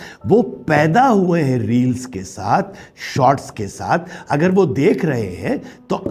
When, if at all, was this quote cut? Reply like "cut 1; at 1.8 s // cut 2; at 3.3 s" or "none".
none